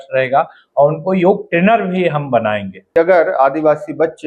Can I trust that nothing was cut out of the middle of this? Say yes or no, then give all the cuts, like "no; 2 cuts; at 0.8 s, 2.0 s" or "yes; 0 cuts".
no; 1 cut; at 2.9 s